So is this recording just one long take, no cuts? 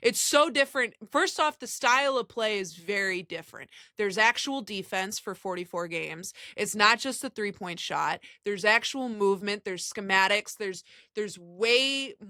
yes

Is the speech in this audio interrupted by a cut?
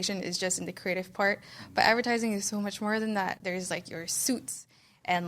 yes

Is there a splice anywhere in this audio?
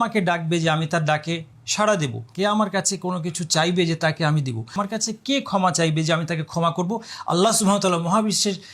yes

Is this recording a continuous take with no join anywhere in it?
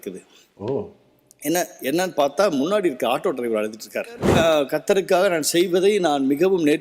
no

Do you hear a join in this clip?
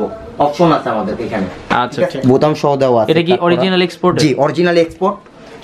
yes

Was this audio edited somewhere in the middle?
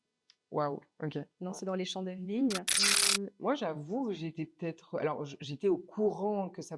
yes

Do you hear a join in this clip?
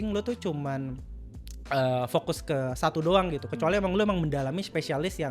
no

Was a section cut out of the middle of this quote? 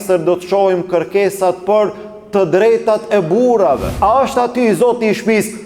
yes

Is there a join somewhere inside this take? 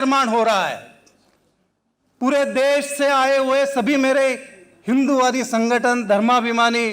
no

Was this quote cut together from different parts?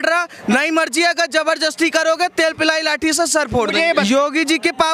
yes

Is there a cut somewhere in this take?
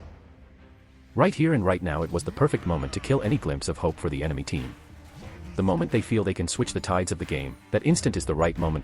yes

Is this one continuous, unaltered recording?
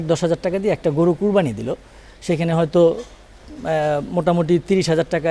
yes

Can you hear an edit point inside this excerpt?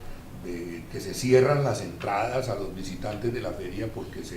yes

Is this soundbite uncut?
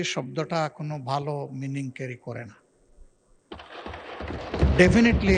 yes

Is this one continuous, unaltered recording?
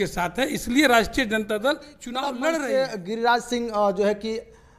no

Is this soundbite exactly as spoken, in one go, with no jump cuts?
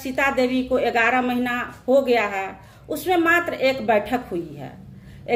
yes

